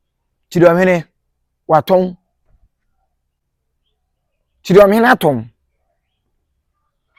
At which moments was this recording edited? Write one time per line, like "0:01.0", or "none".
none

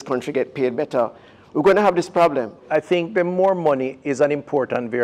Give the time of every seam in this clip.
0:02.6

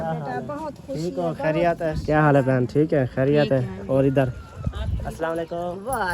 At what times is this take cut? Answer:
0:02.0

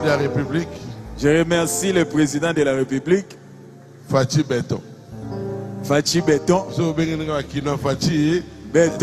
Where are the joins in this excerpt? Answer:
none

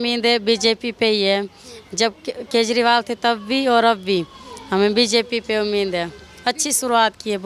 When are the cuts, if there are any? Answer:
none

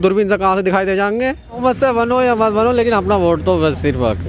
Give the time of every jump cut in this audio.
0:01.6

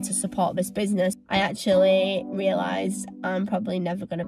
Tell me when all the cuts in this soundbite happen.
0:01.2

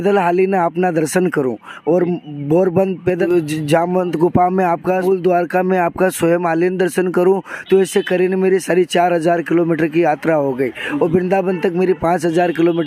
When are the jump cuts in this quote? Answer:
0:03.2
0:05.0

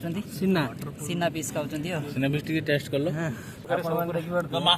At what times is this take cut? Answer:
0:03.7

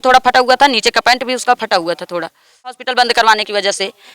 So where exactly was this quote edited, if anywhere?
0:02.8

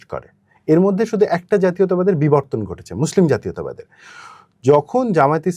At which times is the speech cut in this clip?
none

